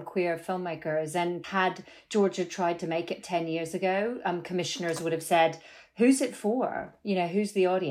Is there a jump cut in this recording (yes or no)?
yes